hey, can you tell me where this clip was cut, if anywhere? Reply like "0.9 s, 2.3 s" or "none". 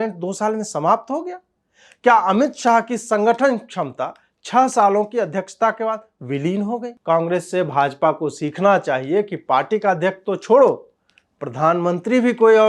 6.9 s